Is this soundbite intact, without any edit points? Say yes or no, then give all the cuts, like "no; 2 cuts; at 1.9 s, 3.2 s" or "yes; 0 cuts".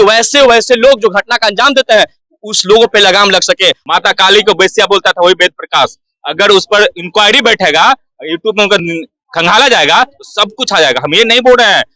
no; 1 cut; at 3.8 s